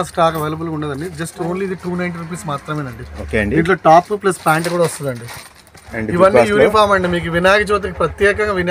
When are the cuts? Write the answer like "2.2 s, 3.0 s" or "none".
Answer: 5.8 s